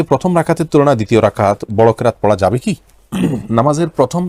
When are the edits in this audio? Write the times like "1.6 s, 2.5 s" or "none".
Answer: none